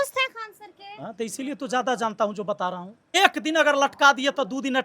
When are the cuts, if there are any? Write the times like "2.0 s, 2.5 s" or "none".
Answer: 3.2 s